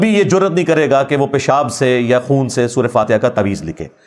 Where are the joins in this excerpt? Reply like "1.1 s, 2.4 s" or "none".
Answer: none

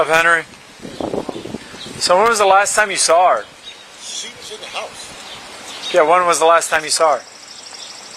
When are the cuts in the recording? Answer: none

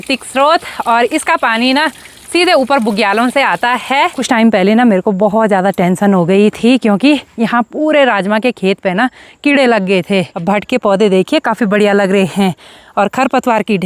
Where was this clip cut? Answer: 4.2 s, 10.3 s

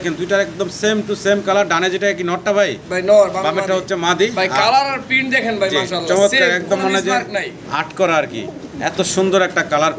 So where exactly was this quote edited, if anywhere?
none

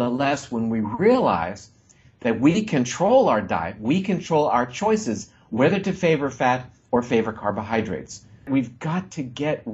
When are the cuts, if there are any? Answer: 8.5 s

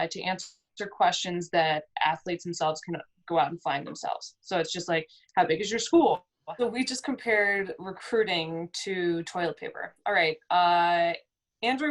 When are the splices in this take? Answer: 6.3 s

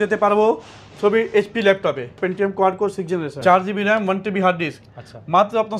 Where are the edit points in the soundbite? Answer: 2.2 s, 3.4 s

